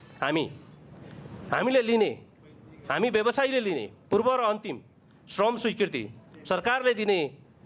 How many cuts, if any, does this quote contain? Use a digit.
0